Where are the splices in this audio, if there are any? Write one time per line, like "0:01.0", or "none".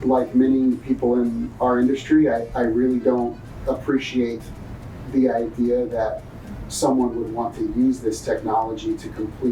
none